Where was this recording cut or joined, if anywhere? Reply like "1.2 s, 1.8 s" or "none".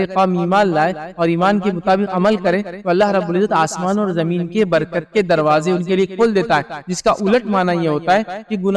none